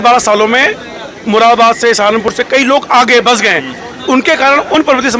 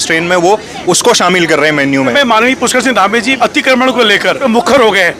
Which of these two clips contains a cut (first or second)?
second